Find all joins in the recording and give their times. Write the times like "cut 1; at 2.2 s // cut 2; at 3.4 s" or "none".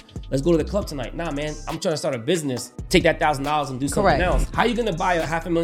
cut 1; at 2.7 s // cut 2; at 4.5 s